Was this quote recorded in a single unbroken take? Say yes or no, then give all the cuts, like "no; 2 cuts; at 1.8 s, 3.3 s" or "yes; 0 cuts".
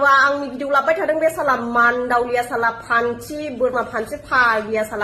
yes; 0 cuts